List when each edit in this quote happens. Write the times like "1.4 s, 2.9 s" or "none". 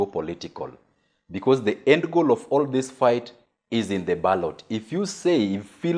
none